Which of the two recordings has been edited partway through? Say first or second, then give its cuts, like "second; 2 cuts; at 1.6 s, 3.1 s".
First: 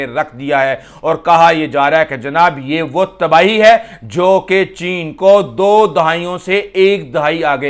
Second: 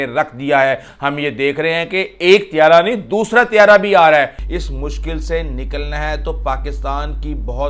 second; 2 cuts; at 0.9 s, 4.4 s